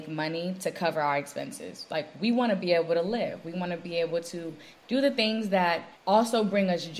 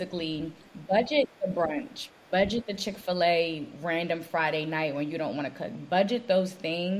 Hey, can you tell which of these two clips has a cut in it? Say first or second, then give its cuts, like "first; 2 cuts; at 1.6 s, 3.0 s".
first; 2 cuts; at 4.8 s, 5.9 s